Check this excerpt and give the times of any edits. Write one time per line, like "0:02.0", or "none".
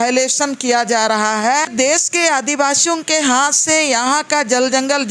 0:01.7